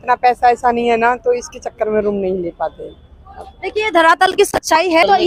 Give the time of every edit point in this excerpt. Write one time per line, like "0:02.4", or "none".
none